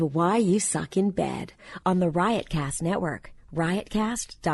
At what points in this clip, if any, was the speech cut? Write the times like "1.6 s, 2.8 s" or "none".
none